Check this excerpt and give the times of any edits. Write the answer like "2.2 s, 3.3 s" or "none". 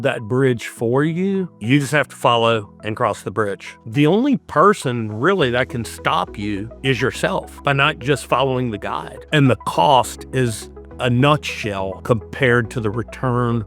3.7 s, 9.2 s